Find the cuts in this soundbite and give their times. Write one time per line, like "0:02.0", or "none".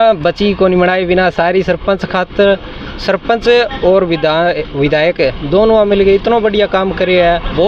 none